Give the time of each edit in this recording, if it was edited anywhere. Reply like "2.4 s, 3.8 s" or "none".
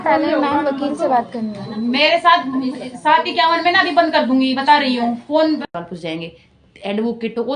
5.7 s